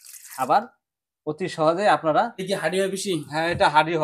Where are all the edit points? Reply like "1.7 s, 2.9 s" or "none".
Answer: 2.4 s